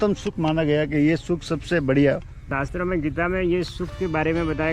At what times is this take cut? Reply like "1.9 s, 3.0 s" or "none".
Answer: none